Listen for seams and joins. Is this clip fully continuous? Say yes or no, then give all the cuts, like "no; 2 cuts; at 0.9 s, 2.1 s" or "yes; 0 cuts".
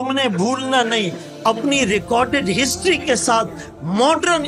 yes; 0 cuts